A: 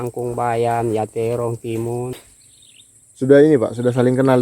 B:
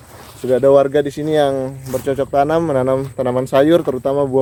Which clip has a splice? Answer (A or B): A